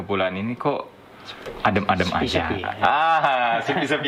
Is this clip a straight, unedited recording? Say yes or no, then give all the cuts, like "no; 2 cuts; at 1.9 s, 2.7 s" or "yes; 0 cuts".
yes; 0 cuts